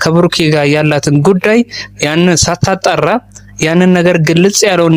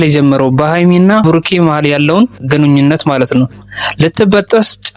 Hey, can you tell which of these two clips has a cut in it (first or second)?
second